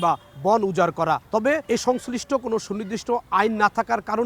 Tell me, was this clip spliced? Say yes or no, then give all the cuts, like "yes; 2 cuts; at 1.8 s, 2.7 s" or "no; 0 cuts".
yes; 1 cut; at 1.5 s